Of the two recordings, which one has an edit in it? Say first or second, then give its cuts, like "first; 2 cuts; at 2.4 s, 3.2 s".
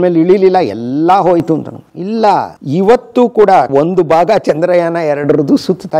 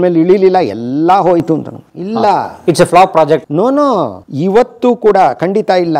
first; 2 cuts; at 2.5 s, 3.7 s